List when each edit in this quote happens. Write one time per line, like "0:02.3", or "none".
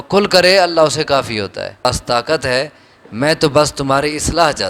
0:01.9